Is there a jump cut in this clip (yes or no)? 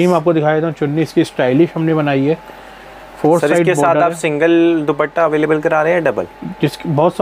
no